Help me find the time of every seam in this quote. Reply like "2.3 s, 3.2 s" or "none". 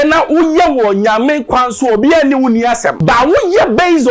2.9 s